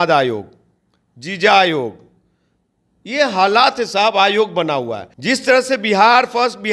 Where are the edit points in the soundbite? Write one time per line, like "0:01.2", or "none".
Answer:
0:05.1